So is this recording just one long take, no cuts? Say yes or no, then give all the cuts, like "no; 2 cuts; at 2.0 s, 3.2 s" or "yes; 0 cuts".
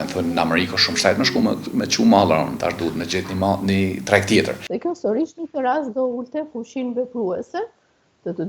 no; 1 cut; at 4.6 s